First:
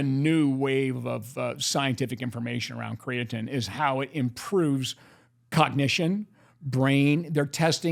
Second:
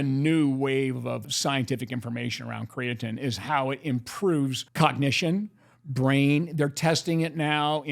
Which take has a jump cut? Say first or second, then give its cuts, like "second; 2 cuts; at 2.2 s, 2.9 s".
second; 2 cuts; at 1.3 s, 4.6 s